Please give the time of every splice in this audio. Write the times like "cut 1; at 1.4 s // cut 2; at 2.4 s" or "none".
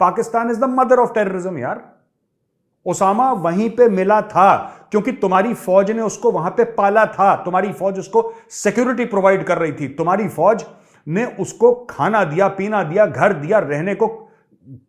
none